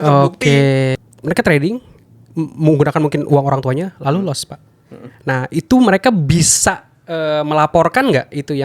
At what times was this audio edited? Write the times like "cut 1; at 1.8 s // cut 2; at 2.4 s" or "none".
cut 1; at 1.0 s